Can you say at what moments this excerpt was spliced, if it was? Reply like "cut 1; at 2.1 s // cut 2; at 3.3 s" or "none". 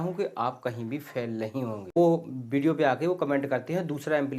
cut 1; at 2.0 s